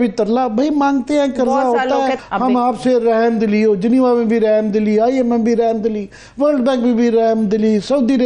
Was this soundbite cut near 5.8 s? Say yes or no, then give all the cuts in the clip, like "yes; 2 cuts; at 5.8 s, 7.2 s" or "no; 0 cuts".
no; 1 cut; at 2.2 s